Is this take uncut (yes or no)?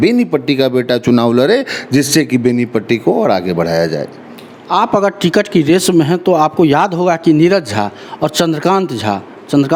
yes